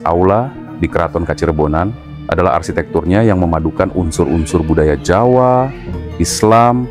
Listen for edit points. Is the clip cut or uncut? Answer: uncut